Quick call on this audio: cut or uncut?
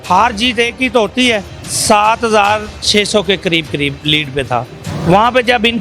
cut